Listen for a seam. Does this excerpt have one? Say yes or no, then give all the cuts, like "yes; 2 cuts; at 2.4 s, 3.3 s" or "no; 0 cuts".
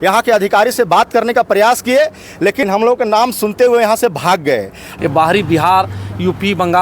yes; 2 cuts; at 2.6 s, 4.9 s